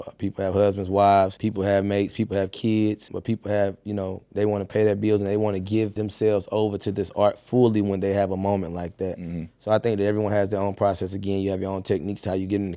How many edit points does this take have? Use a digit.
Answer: 3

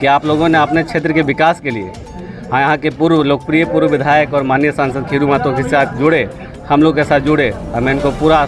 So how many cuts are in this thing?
0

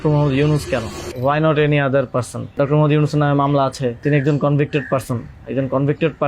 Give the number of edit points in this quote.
3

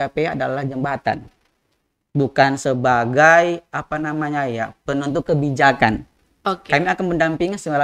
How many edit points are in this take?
0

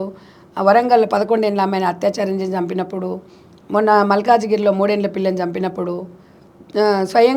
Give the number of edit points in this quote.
0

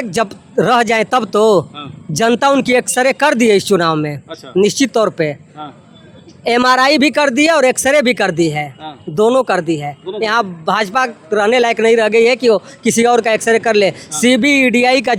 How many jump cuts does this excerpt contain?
0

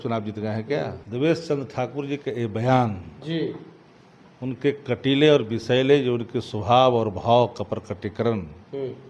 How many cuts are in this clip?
1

